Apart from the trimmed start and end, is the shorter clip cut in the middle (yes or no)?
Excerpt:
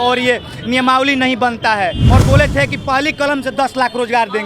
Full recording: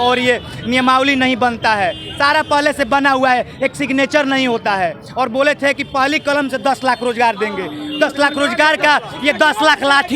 yes